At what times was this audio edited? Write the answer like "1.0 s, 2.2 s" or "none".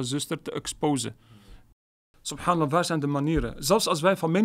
1.6 s